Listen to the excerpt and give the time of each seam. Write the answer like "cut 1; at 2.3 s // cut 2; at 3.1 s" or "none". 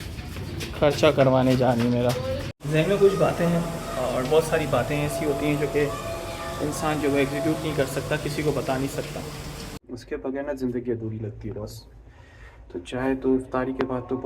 cut 1; at 2.5 s // cut 2; at 9.7 s